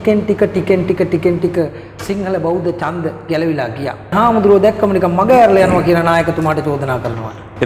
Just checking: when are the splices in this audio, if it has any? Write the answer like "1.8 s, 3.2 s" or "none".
4.1 s

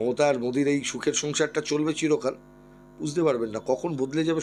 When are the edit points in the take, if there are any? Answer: none

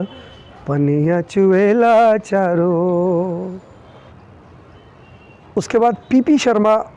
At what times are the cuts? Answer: 3.9 s

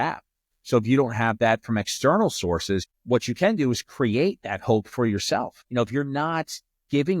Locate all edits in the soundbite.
2.8 s, 5.6 s

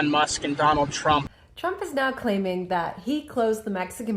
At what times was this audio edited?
1.3 s

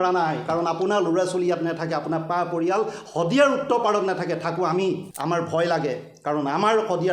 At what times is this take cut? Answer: 5.1 s

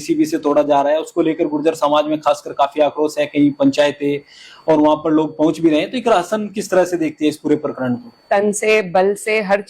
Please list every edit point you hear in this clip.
8.1 s

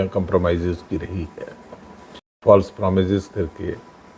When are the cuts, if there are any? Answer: 2.4 s

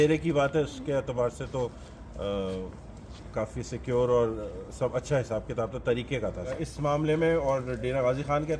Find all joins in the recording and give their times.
6.5 s

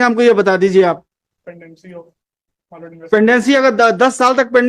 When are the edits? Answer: 1.4 s

